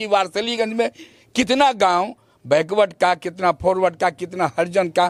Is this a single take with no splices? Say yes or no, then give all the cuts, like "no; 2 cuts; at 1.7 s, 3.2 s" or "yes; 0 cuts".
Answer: yes; 0 cuts